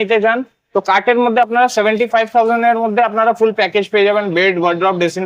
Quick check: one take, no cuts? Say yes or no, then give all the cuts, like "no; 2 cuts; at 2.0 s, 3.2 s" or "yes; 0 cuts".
yes; 0 cuts